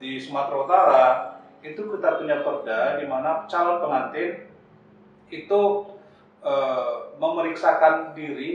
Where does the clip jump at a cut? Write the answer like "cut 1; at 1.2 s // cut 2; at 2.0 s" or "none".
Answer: none